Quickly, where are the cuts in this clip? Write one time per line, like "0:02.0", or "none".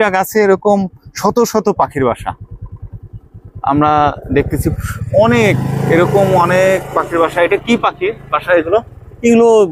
none